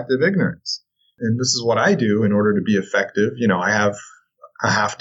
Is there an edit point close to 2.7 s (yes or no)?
no